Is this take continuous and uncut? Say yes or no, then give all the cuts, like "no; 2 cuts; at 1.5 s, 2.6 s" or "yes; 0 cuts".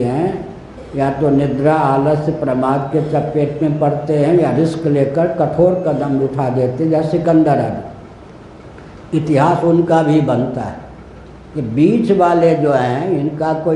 yes; 0 cuts